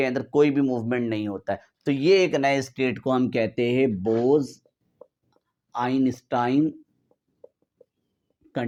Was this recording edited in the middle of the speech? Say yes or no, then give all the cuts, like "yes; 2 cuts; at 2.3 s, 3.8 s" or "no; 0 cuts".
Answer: no; 0 cuts